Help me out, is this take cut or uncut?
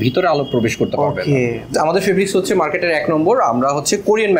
cut